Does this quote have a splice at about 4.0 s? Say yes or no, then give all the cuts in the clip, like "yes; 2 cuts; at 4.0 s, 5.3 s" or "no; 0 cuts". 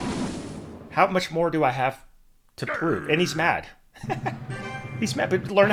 no; 0 cuts